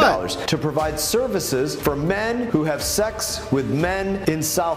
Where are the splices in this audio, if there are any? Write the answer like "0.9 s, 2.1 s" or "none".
none